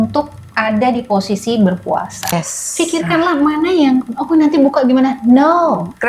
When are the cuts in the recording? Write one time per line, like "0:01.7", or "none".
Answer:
0:02.3

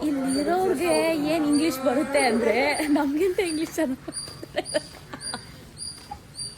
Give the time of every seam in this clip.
none

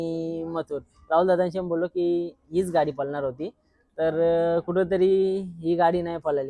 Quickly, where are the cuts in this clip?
none

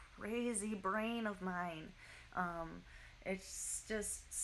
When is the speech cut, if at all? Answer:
none

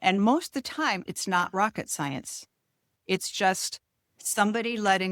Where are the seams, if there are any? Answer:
0:01.0
0:02.9

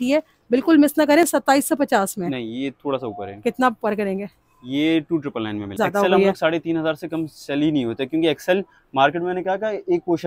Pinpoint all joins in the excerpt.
none

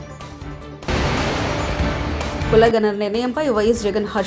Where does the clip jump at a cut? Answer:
0:00.8
0:02.4

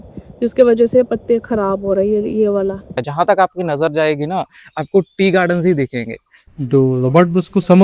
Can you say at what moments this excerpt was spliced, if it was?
0:03.0
0:06.3

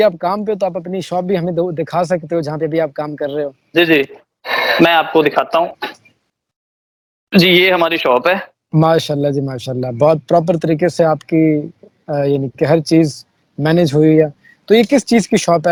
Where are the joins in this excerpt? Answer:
none

